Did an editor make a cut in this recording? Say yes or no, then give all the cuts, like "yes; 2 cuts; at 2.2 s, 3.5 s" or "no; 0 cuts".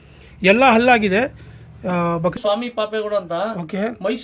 yes; 1 cut; at 2.3 s